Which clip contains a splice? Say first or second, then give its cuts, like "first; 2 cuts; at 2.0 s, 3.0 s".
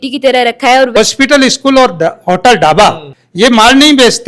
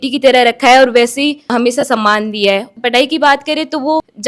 first; 1 cut; at 1.0 s